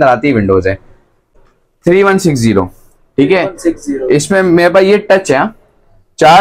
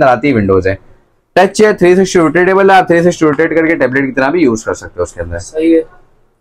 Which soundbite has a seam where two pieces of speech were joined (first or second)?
first